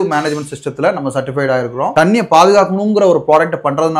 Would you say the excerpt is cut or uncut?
cut